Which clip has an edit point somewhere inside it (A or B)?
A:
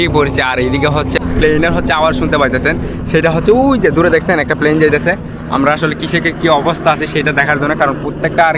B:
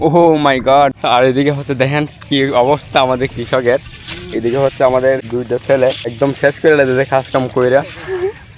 B